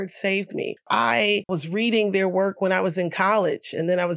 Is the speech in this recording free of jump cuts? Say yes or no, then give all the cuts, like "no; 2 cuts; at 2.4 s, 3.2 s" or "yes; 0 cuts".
no; 1 cut; at 1.2 s